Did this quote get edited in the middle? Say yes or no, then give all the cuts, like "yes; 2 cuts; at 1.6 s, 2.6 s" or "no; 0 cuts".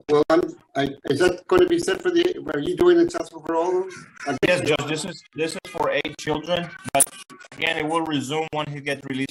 no; 0 cuts